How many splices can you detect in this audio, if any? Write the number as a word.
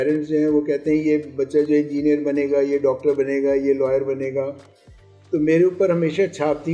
zero